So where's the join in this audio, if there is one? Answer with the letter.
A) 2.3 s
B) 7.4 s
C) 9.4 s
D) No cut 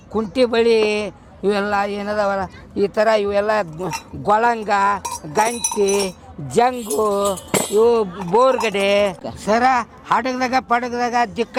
D